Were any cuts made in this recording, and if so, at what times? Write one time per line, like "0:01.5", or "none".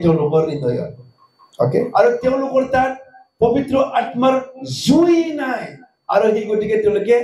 0:01.9